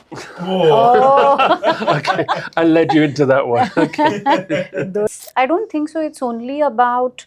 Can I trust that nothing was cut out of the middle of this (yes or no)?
no